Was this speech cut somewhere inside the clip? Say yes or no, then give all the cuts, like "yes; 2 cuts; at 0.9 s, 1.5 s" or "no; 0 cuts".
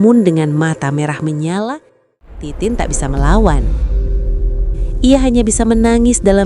yes; 1 cut; at 2.5 s